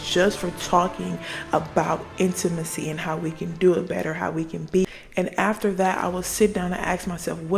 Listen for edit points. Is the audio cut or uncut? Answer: cut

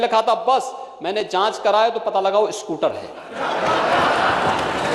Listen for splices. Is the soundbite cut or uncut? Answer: uncut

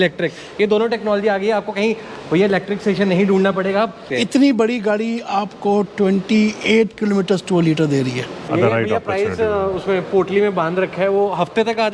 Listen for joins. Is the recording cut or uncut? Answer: cut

